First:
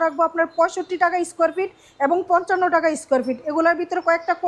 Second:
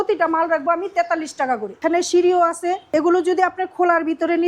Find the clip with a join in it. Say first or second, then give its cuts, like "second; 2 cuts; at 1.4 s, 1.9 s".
second; 2 cuts; at 1.8 s, 2.8 s